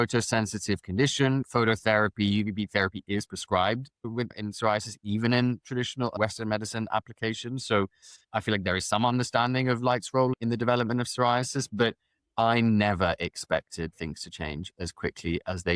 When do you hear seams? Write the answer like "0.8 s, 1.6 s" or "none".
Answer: 1.4 s, 4.4 s, 6.1 s, 10.3 s